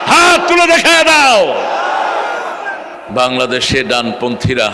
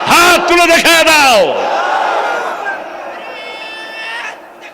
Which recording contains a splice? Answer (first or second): first